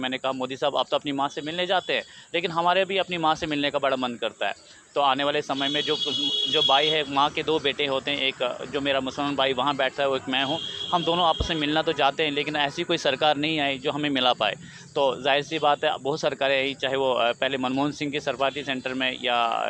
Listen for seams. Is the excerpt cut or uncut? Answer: uncut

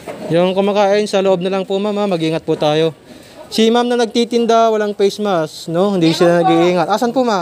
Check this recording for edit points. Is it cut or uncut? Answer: uncut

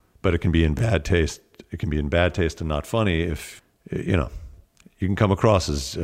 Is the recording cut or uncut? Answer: cut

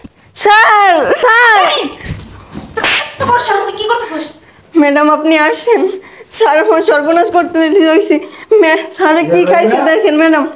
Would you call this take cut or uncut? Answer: uncut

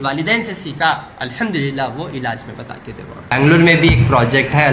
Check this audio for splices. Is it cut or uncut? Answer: cut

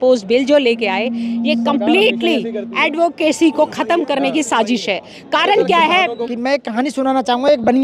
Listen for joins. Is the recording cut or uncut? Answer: cut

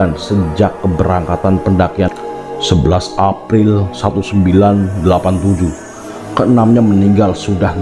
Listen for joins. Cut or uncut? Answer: cut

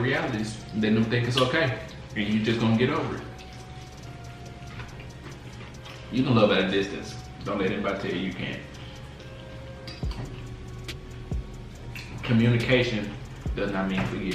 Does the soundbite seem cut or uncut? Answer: cut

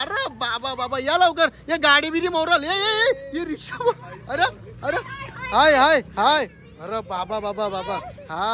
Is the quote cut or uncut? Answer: uncut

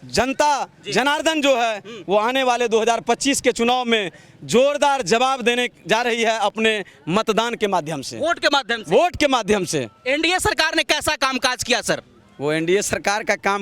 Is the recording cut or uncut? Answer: uncut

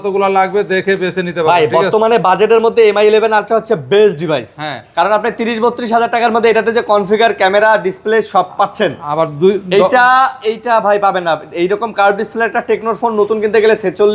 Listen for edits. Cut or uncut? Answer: uncut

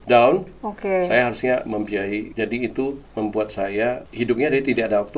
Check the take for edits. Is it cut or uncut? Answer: cut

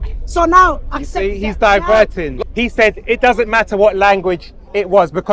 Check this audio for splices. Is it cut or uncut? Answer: cut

